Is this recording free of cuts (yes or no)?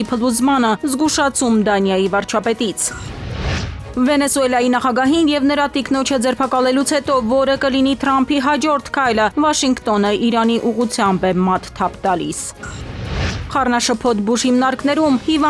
yes